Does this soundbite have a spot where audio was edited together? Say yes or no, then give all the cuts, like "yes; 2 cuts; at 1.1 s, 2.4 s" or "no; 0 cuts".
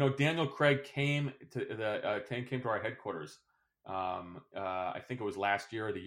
no; 0 cuts